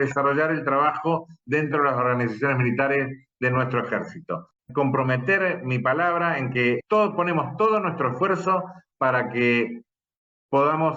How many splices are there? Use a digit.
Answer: 2